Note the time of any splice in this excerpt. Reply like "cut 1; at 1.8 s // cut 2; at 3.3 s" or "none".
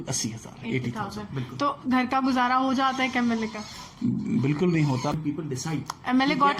cut 1; at 5.1 s